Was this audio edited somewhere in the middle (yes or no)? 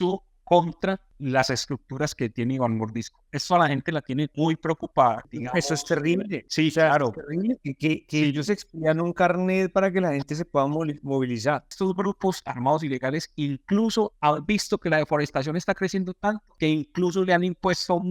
yes